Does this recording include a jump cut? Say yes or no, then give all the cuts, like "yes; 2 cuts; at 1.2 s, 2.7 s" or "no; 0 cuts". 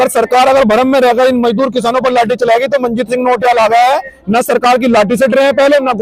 no; 0 cuts